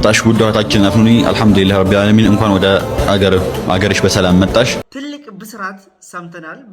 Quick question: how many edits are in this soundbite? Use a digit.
1